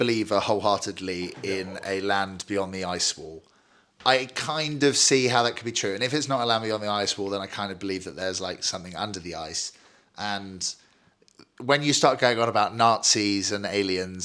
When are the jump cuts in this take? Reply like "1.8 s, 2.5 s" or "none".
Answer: none